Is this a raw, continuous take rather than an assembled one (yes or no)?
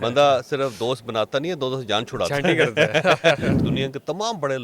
no